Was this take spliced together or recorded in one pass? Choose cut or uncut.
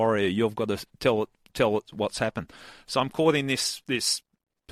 uncut